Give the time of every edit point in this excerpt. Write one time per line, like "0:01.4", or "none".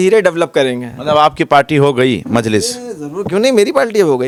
none